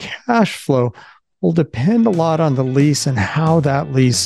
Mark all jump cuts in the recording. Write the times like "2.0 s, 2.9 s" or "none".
none